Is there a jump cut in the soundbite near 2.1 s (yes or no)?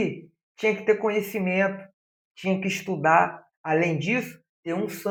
no